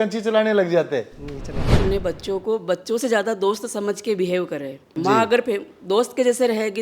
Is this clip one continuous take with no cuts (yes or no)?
no